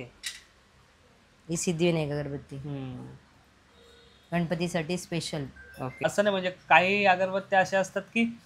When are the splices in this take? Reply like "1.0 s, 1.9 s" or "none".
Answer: 6.0 s